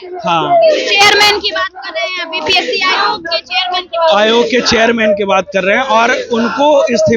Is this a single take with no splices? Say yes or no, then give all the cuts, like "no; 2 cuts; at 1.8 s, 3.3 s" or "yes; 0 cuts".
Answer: yes; 0 cuts